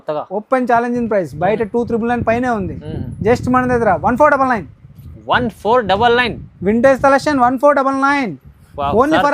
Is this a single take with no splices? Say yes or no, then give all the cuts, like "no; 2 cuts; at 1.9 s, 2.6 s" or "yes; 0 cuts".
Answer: yes; 0 cuts